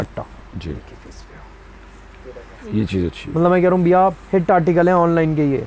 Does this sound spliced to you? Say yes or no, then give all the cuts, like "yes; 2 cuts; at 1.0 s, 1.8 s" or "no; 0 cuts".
no; 0 cuts